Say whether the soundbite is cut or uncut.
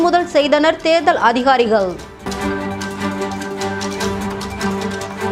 uncut